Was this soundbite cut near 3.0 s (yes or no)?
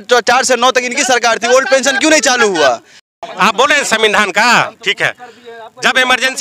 yes